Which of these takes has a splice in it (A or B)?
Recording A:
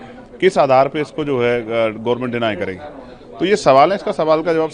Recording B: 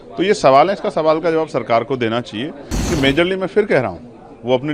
B